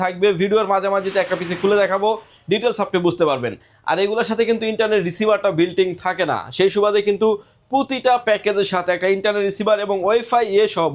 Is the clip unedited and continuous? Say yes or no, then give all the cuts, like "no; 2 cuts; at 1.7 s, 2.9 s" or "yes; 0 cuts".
yes; 0 cuts